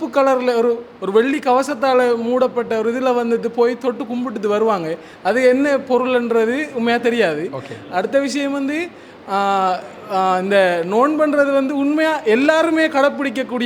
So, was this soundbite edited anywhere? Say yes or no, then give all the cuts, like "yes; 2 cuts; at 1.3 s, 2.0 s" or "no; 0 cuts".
no; 0 cuts